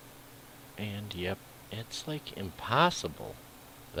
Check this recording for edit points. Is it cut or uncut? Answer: uncut